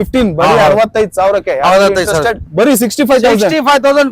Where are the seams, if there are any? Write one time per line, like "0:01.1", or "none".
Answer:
0:02.4